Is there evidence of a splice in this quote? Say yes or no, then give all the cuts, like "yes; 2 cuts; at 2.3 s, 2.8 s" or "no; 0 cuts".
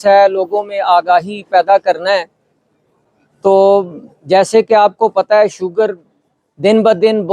no; 0 cuts